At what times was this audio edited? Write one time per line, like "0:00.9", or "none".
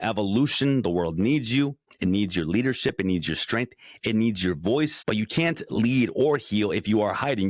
0:01.9
0:05.0